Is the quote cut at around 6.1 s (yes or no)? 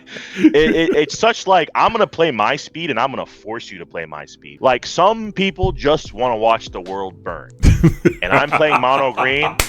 no